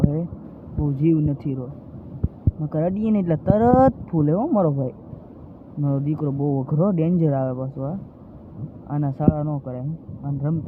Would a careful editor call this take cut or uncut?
uncut